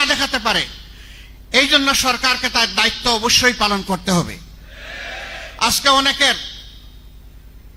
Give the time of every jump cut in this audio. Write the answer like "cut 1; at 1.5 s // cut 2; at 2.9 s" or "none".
none